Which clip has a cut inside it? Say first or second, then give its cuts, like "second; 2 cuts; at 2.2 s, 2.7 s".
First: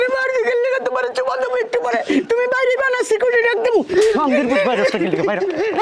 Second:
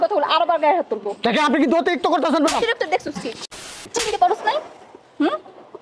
second; 1 cut; at 3.5 s